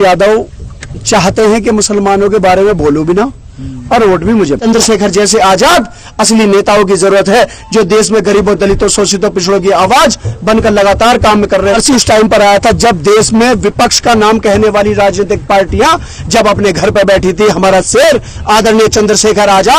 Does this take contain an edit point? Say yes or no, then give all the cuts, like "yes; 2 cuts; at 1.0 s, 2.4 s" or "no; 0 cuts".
yes; 2 cuts; at 4.6 s, 11.7 s